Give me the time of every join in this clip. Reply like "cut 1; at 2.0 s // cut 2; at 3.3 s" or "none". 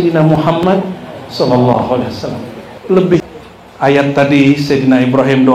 cut 1; at 3.3 s